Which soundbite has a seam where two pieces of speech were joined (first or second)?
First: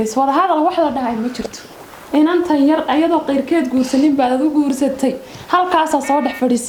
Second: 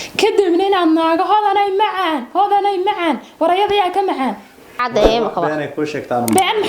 second